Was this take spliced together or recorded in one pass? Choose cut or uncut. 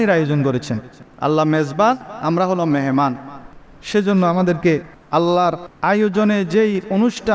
cut